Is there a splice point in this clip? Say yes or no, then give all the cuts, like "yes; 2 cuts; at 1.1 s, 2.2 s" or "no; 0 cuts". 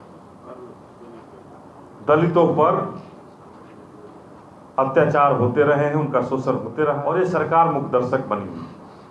yes; 1 cut; at 7.0 s